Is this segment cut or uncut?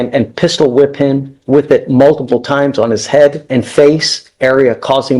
cut